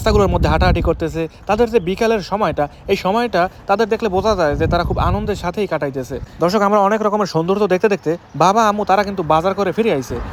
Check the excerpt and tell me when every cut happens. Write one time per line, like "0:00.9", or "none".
none

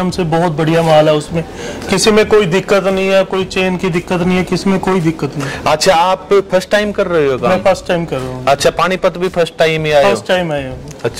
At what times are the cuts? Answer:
none

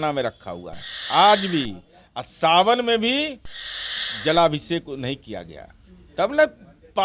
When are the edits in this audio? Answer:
none

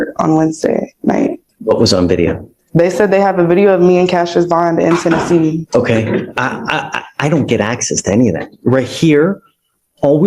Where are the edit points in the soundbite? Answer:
0:01.5
0:05.6

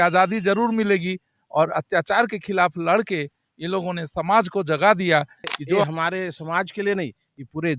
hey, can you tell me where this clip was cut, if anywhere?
0:05.9

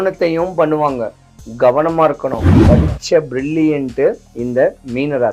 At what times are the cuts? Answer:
0:02.5
0:04.3

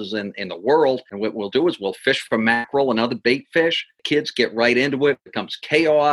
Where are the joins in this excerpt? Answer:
0:01.1
0:03.9

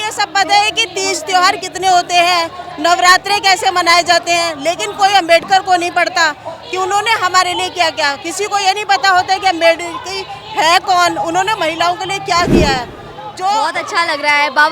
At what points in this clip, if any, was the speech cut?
0:13.6

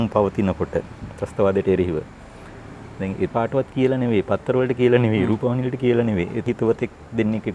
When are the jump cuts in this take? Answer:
0:03.3
0:06.4

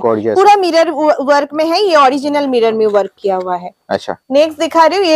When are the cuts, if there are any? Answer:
none

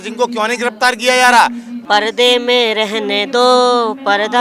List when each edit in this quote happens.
0:01.7

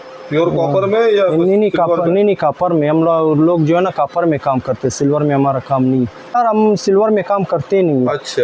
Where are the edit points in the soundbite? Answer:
0:06.4

